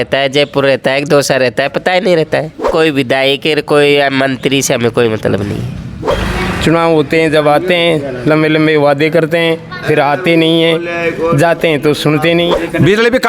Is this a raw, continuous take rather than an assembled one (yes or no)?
no